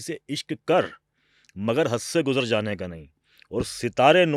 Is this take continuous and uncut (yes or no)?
yes